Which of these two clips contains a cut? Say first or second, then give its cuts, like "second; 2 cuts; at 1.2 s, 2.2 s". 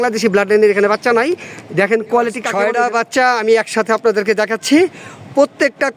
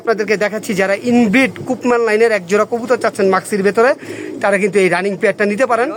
first; 1 cut; at 2.4 s